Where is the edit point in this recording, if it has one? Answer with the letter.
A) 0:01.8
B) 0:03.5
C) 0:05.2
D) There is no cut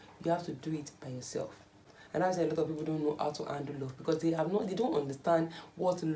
A